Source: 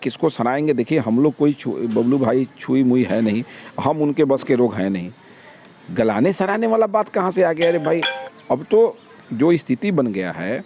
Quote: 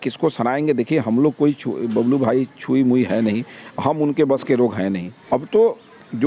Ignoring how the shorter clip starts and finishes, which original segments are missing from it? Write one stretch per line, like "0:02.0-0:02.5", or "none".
0:05.1-0:08.3